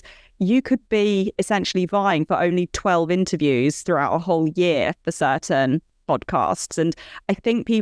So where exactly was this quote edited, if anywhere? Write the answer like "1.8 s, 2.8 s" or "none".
5.9 s